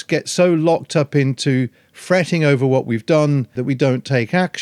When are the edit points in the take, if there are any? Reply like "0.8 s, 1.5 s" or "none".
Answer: 3.6 s